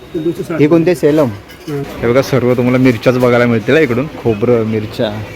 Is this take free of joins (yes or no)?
no